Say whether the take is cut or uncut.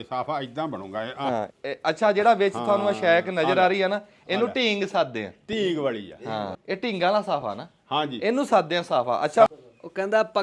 cut